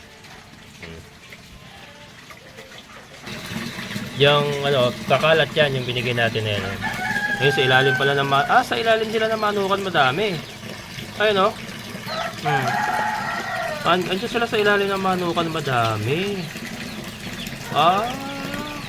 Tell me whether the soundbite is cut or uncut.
cut